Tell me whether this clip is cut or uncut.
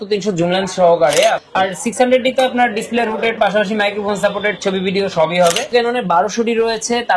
cut